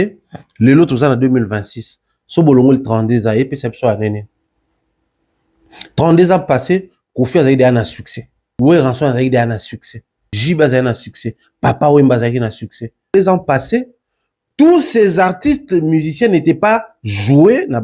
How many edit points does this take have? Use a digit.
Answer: 3